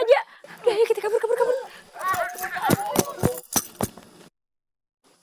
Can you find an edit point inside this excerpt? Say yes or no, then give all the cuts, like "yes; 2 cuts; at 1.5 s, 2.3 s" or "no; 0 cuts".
no; 0 cuts